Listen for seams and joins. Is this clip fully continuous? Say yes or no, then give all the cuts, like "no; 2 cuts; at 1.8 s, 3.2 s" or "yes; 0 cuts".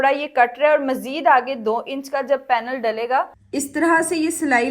no; 1 cut; at 3.4 s